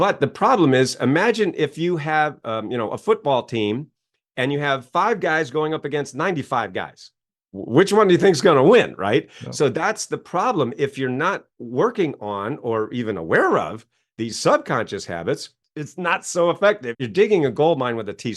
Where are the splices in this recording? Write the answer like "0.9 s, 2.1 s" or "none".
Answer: 17.0 s